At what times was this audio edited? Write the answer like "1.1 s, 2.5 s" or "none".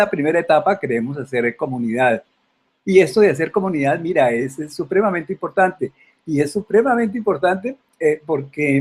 7.7 s